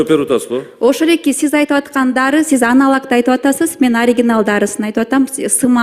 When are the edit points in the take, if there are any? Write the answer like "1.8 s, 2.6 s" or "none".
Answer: none